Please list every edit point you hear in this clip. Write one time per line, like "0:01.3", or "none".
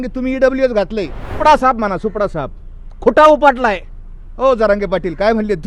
0:01.3